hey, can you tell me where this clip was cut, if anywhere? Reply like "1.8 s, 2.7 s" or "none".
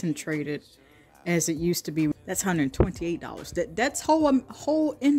2.1 s